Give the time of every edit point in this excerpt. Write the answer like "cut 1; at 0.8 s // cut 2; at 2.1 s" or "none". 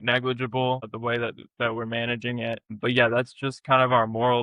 cut 1; at 0.9 s // cut 2; at 2.8 s